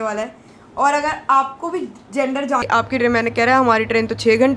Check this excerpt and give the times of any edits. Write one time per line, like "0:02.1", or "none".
0:02.6